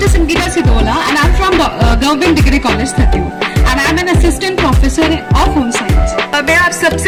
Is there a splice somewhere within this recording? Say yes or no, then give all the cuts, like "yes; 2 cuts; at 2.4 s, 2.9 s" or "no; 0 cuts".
no; 0 cuts